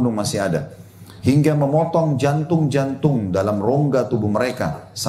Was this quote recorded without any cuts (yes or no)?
yes